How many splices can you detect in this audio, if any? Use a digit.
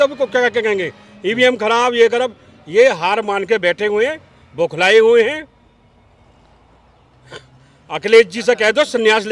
0